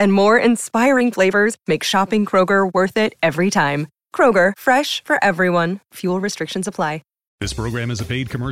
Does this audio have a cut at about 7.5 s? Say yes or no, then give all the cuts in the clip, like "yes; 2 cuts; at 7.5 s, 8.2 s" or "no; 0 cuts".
yes; 1 cut; at 7.5 s